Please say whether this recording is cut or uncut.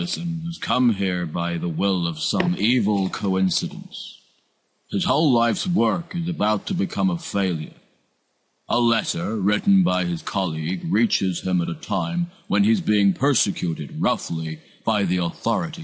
cut